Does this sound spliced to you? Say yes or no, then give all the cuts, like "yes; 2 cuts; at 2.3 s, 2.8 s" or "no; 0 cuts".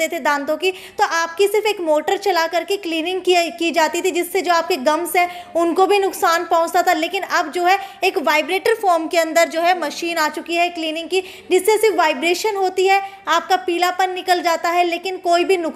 no; 0 cuts